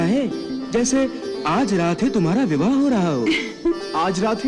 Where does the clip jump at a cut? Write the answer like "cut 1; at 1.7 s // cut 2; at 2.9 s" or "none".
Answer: none